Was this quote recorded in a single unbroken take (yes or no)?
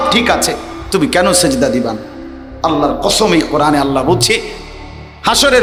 yes